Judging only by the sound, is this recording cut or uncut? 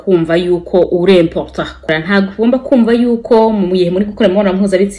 cut